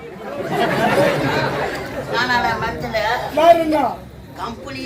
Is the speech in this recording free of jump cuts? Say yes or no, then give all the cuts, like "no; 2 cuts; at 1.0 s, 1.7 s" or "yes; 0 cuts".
no; 1 cut; at 2.1 s